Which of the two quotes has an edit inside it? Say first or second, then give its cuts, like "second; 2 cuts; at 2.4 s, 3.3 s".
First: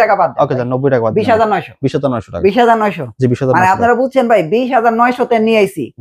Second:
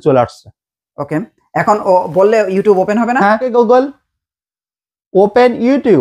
second; 1 cut; at 3.4 s